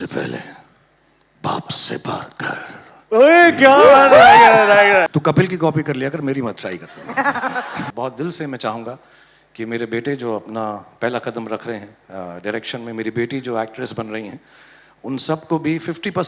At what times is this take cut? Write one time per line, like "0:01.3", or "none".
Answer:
0:05.1
0:07.9